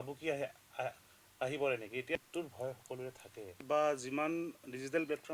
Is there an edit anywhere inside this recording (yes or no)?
yes